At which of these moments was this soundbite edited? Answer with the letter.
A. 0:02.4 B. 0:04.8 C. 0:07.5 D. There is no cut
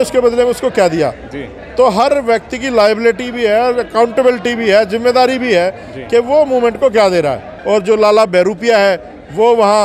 C